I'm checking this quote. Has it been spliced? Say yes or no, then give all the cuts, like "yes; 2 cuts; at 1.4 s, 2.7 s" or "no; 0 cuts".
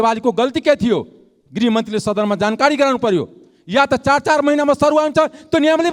no; 0 cuts